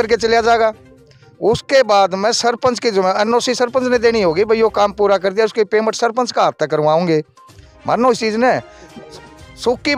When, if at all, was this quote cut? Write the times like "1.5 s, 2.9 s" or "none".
none